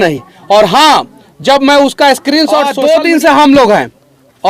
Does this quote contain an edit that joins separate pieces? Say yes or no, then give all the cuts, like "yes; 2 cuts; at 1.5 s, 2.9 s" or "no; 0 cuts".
yes; 1 cut; at 2.7 s